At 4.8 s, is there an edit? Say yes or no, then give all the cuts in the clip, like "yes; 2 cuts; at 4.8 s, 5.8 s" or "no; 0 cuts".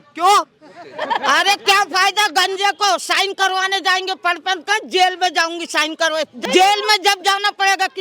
no; 1 cut; at 6.3 s